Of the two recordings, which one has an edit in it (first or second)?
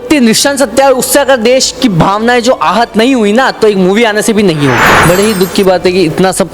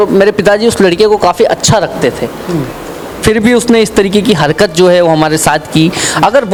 first